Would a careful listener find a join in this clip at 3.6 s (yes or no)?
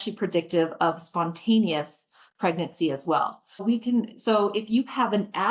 yes